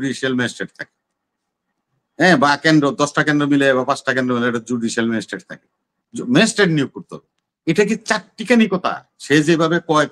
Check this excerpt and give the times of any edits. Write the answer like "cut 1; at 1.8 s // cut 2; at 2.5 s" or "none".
none

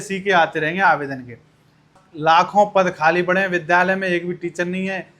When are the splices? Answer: cut 1; at 2.0 s

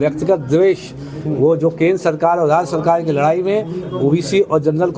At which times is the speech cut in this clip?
cut 1; at 3.1 s

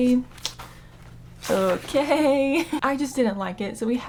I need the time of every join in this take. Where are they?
none

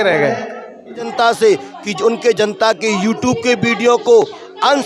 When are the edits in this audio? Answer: cut 1; at 1.0 s

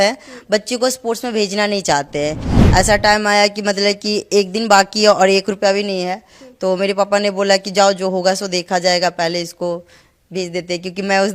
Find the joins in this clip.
cut 1; at 2.6 s

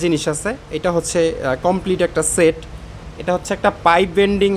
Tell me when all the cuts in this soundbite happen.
none

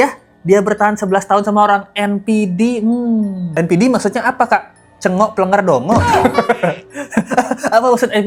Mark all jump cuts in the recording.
none

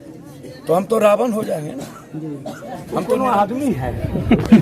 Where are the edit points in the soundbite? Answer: cut 1; at 3.0 s

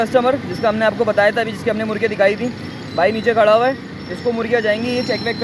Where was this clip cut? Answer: none

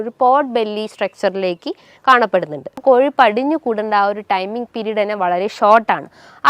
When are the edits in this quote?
cut 1; at 2.8 s

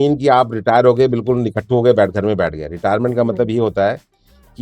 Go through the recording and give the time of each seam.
none

